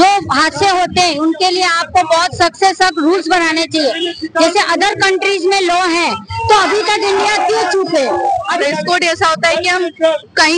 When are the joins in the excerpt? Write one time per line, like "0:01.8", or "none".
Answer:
0:08.6